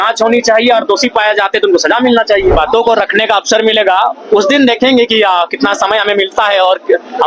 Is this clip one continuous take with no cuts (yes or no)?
no